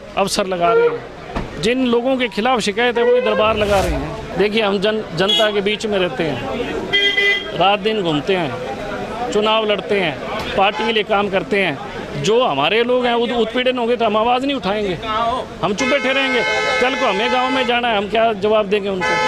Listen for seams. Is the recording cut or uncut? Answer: cut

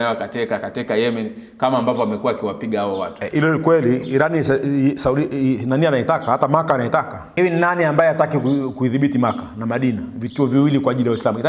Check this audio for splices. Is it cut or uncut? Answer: cut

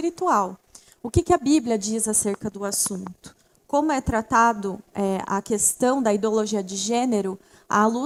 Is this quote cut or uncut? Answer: uncut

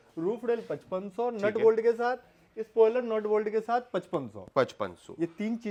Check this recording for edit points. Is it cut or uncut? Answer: uncut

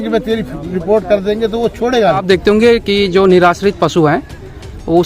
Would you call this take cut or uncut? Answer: cut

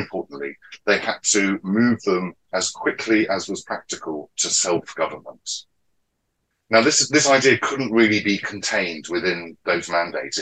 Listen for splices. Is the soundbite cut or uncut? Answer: uncut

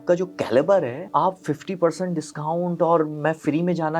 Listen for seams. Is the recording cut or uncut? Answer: cut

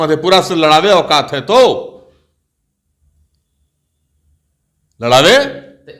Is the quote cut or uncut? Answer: uncut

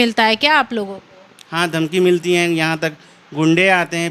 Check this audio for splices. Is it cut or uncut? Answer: uncut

